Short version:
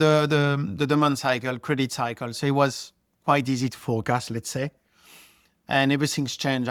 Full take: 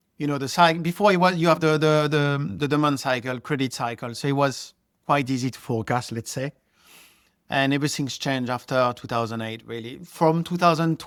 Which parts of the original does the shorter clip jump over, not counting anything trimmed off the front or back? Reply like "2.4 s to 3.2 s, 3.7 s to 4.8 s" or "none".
none